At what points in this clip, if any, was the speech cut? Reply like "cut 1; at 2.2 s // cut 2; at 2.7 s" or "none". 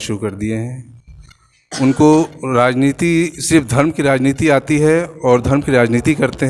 none